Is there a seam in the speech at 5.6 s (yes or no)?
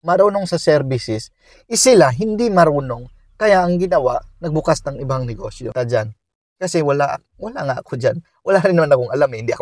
yes